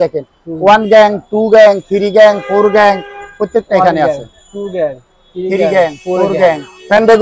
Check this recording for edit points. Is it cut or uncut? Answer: uncut